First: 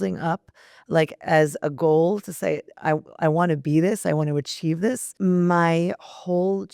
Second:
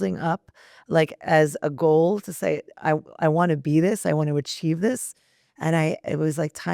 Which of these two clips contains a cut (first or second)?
first